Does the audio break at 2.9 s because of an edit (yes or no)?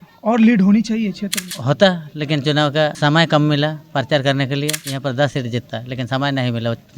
yes